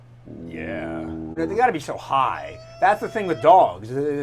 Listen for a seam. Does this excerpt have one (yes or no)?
yes